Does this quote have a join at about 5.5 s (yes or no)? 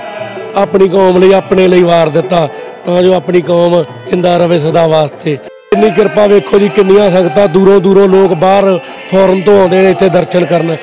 yes